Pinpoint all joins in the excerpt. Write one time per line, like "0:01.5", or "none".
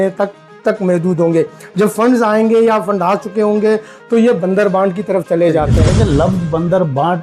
0:05.8